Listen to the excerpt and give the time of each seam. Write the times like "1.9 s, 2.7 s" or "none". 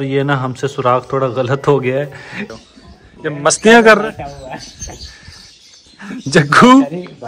2.5 s

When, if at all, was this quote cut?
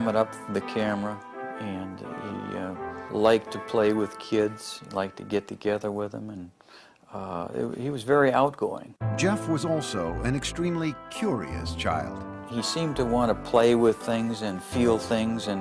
none

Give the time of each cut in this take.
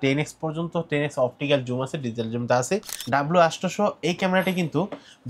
2.9 s

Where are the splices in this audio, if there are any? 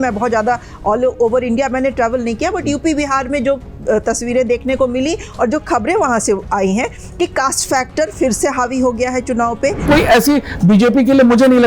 9.8 s

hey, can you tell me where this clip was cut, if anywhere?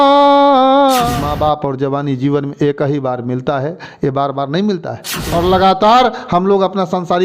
1.1 s, 5.2 s

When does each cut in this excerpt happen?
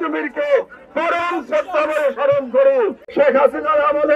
3.0 s

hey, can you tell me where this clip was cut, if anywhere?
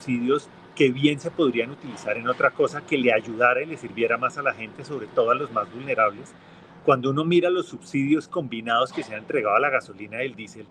none

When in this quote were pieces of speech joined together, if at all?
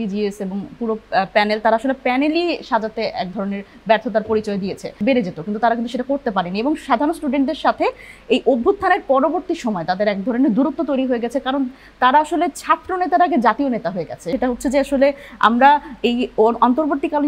5.0 s, 14.3 s

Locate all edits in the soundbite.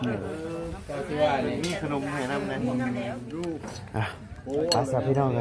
3.2 s

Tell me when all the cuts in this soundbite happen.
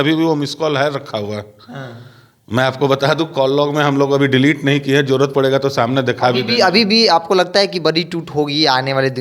none

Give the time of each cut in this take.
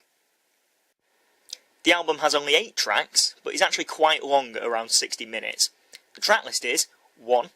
3.0 s

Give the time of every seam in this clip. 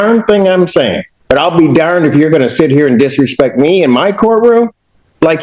1.1 s

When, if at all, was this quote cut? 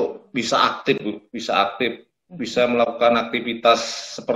none

